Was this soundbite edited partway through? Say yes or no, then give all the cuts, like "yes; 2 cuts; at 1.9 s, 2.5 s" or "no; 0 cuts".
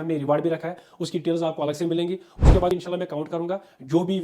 yes; 1 cut; at 2.7 s